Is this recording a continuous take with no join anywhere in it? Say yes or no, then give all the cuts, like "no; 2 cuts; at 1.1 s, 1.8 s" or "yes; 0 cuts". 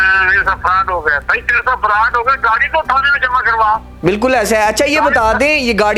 yes; 0 cuts